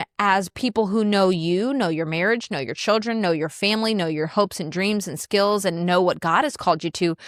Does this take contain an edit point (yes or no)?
no